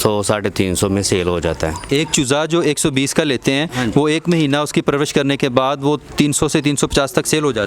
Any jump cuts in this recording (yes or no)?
no